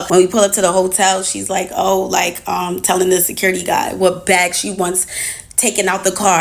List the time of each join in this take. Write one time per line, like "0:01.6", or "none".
none